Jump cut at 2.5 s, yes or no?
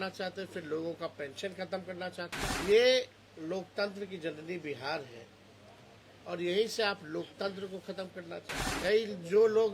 yes